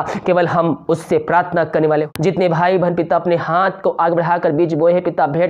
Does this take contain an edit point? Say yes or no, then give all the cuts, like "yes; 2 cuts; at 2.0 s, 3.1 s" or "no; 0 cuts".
yes; 1 cut; at 2.1 s